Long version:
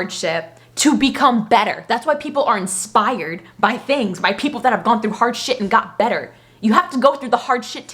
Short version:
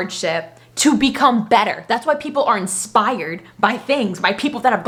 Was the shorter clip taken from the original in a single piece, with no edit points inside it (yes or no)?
yes